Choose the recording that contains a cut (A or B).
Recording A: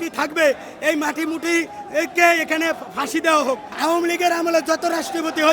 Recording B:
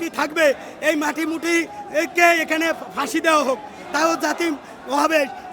A